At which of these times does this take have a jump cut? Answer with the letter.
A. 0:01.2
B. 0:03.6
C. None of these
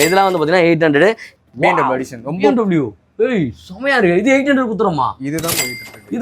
A